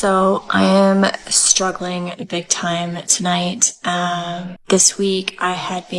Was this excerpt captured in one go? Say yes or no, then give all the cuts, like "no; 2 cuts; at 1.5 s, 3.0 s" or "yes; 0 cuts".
no; 1 cut; at 4.5 s